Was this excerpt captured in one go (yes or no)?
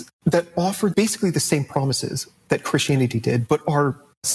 yes